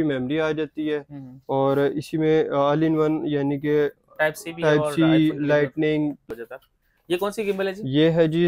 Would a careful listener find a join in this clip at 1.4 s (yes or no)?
no